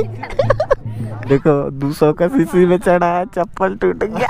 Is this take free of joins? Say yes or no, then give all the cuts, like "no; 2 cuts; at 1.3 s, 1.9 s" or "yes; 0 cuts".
no; 1 cut; at 1.1 s